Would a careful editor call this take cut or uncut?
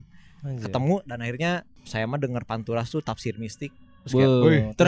cut